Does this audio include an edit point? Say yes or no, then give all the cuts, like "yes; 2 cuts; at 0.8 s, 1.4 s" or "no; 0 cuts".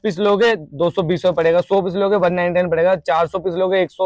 no; 0 cuts